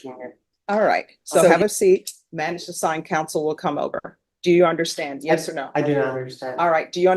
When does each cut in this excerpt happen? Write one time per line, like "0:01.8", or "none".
0:01.5